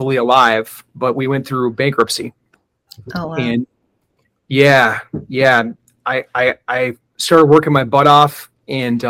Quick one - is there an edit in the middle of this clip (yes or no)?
no